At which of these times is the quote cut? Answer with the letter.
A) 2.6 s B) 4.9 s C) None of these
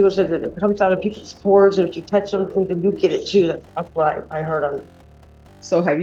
C